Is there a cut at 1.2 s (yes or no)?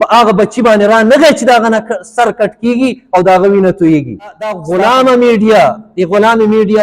no